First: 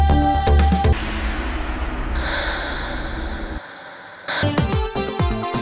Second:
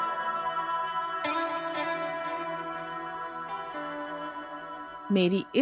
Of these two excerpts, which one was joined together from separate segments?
first; 1 cut; at 4.4 s

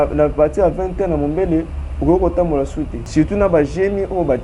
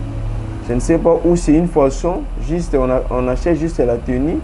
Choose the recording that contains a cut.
first; 1 cut; at 3.0 s

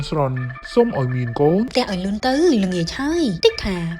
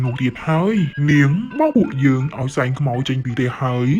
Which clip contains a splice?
first; 1 cut; at 1.7 s

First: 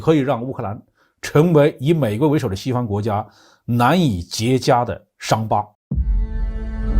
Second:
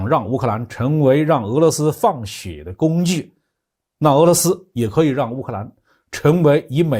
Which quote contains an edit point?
first; 1 cut; at 5.8 s

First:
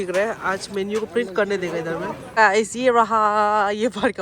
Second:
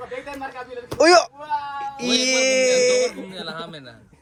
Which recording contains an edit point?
first; 1 cut; at 2.2 s

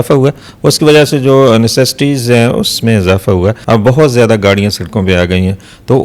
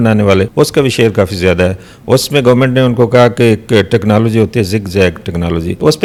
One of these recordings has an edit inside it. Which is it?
first; 1 cut; at 3.6 s

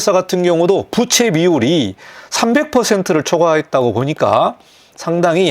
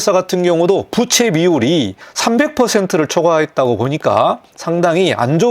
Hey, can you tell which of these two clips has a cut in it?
second; 2 cuts; at 2.0 s, 4.5 s

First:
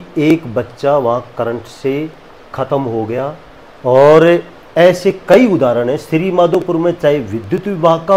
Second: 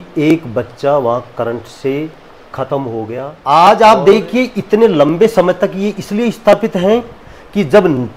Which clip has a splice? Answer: second; 1 cut; at 3.3 s

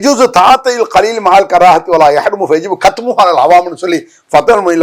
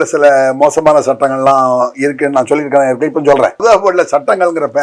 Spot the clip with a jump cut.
second; 1 cut; at 3.6 s

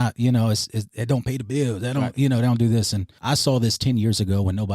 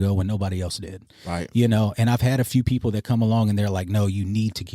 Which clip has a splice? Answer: first; 1 cut; at 3.1 s

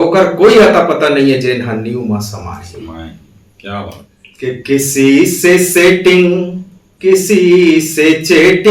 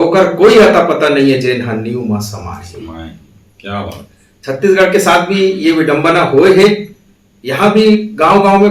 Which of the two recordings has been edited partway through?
first; 1 cut; at 4.3 s

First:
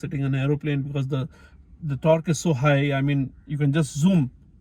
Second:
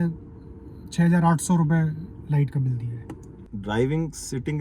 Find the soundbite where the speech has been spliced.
second; 1 cut; at 3.4 s

